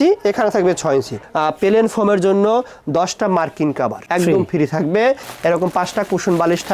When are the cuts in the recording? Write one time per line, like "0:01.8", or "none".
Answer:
0:01.2
0:05.3